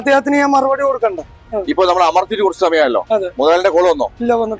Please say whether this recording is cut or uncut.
cut